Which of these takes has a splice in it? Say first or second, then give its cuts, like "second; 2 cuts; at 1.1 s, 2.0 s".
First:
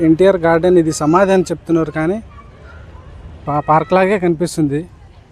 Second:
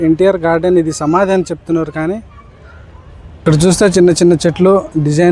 second; 1 cut; at 3.5 s